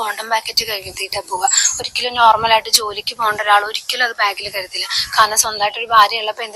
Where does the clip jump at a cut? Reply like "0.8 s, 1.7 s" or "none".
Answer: none